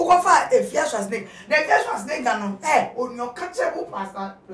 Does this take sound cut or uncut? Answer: uncut